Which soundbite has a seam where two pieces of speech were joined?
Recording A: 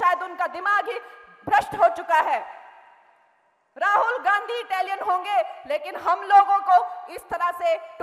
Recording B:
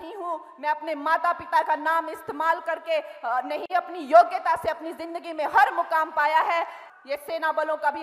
B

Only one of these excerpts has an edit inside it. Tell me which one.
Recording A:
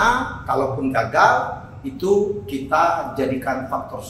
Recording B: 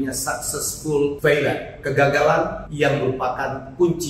B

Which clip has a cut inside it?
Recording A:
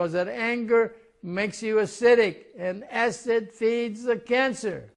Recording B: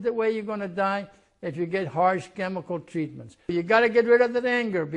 B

